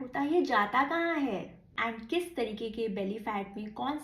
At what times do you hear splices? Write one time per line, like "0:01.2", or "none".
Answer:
0:01.7